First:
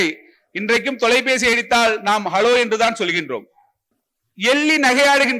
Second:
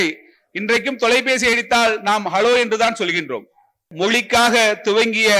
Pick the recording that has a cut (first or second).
second